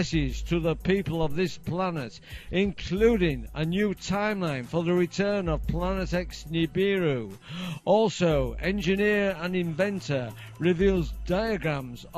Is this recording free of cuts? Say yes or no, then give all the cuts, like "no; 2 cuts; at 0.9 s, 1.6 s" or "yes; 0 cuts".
yes; 0 cuts